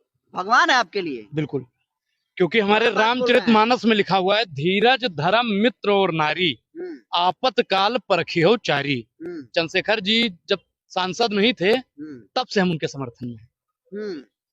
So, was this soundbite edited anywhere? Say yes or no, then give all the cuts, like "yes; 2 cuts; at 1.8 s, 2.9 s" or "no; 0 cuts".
no; 0 cuts